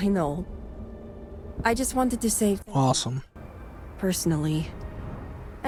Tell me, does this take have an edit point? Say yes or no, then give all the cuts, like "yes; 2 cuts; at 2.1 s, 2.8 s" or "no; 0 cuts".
no; 0 cuts